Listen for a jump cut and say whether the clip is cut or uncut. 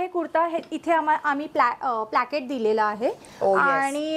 uncut